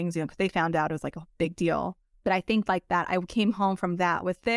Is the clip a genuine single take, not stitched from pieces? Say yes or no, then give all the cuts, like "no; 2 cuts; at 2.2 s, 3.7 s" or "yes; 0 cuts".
yes; 0 cuts